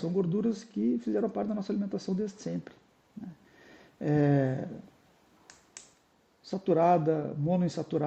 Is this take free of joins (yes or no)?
yes